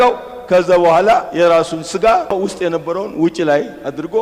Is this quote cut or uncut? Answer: cut